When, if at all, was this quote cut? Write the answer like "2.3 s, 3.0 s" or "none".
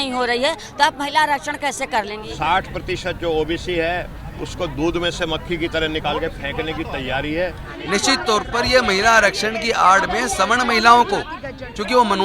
2.2 s, 7.7 s

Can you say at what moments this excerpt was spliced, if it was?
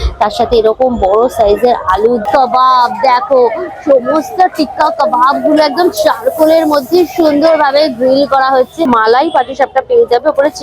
2.3 s, 8.9 s

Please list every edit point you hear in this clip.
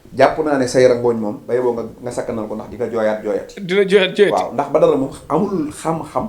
none

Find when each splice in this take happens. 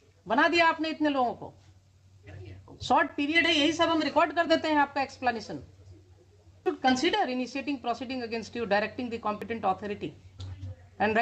6.7 s

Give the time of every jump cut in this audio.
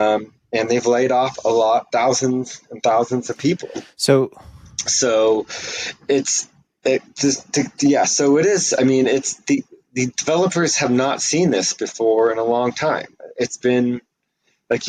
none

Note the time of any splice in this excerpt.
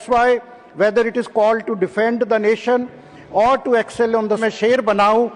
4.4 s

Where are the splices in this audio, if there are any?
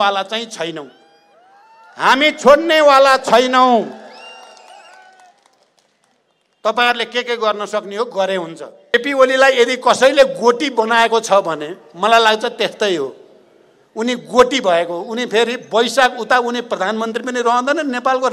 8.9 s

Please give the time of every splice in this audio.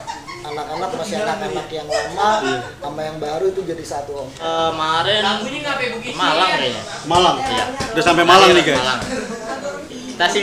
4.4 s

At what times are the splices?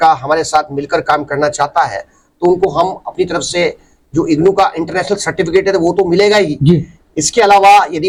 none

